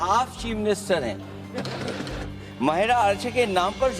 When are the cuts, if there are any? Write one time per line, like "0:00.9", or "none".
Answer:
0:02.2